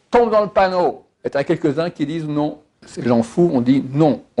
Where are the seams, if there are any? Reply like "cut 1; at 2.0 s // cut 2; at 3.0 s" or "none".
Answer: cut 1; at 1.1 s // cut 2; at 2.8 s